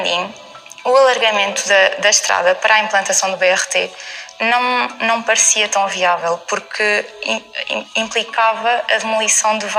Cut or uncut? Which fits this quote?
uncut